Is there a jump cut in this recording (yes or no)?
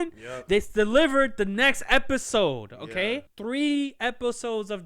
yes